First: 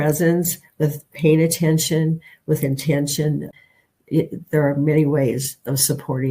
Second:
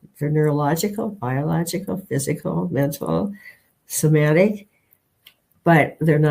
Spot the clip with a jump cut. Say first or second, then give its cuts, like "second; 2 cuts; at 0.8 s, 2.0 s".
first; 1 cut; at 3.5 s